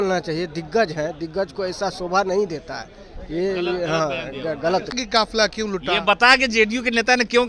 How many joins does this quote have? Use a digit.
1